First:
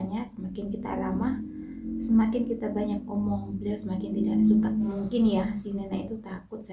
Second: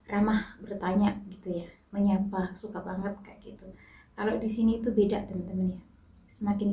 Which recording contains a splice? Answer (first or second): first